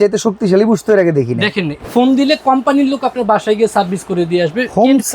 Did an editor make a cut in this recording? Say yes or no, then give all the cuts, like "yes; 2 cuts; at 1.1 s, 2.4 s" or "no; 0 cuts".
yes; 1 cut; at 1.8 s